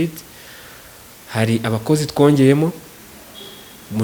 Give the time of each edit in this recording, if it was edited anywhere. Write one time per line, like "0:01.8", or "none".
none